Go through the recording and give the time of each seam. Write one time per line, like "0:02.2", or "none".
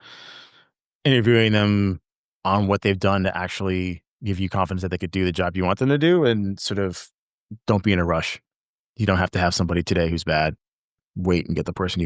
0:10.9